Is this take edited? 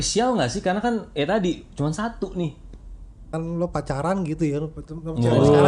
yes; 1 cut; at 3.3 s

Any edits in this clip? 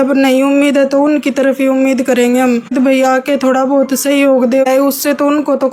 yes; 2 cuts; at 2.7 s, 4.6 s

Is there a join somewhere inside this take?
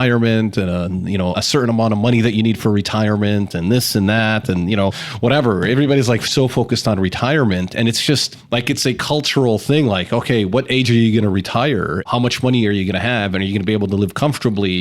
yes; 1 cut; at 12.1 s

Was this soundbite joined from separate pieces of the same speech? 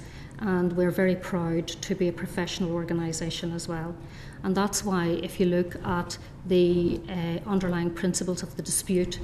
no; 0 cuts

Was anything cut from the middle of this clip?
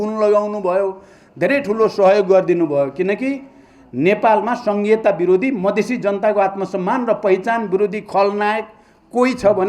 no; 0 cuts

